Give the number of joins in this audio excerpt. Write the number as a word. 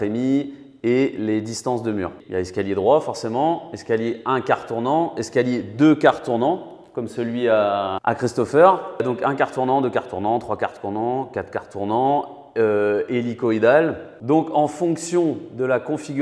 three